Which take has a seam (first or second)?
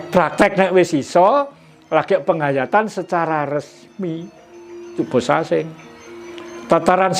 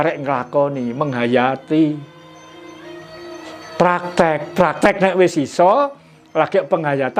first